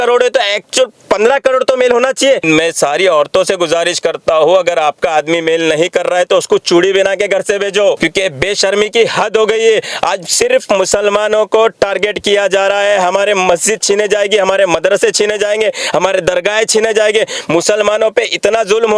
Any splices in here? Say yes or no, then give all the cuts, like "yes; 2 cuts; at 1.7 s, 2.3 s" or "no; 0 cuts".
yes; 2 cuts; at 2.4 s, 8.0 s